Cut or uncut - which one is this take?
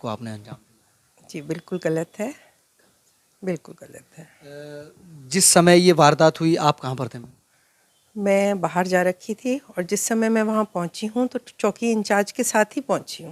uncut